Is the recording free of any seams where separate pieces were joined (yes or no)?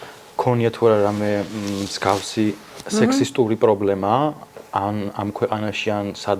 yes